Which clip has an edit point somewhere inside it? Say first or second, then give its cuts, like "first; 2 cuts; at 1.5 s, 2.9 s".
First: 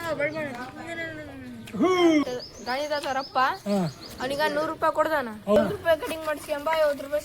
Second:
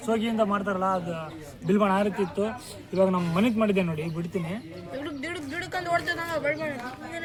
first; 2 cuts; at 2.2 s, 5.6 s